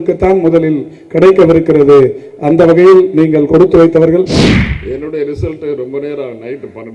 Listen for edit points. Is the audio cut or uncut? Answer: cut